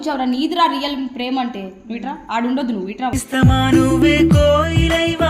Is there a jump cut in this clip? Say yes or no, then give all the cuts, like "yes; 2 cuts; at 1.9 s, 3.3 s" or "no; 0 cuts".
no; 0 cuts